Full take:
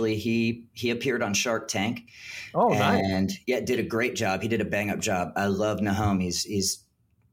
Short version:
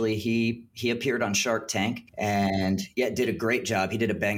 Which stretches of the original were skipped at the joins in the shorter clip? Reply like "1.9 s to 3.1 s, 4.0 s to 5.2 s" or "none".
2.2 s to 2.7 s